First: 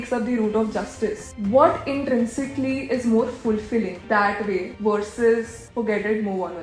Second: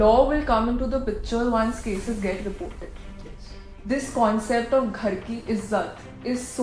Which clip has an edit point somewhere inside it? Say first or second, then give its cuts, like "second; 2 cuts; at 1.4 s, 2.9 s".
first; 4 cuts; at 1.3 s, 4.0 s, 4.7 s, 5.6 s